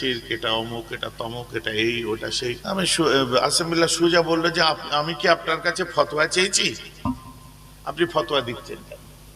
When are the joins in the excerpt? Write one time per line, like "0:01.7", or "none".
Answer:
0:02.6